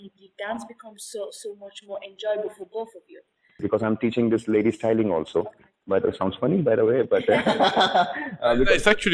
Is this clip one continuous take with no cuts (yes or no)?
no